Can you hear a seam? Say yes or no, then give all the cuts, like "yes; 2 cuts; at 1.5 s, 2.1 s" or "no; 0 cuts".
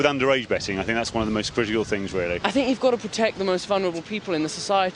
yes; 1 cut; at 2.4 s